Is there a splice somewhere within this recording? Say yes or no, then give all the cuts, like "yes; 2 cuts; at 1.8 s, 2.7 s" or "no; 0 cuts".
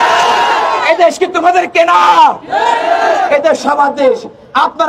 no; 0 cuts